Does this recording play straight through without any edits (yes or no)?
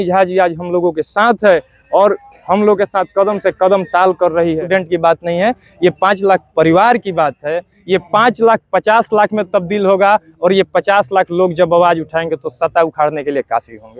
no